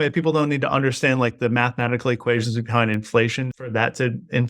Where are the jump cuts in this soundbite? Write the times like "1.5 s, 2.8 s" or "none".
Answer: 3.5 s